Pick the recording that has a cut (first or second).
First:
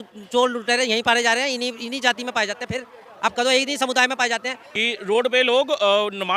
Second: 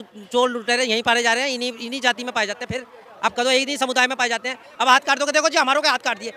first